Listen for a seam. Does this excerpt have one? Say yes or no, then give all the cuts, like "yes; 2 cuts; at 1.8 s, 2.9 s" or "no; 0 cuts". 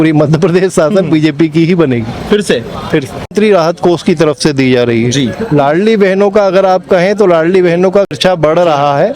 yes; 2 cuts; at 3.3 s, 8.1 s